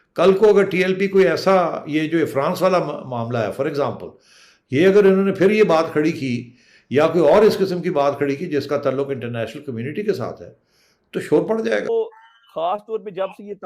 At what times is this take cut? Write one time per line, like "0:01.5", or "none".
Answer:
0:11.9